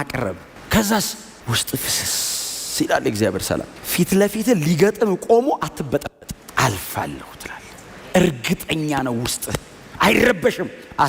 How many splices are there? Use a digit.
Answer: 0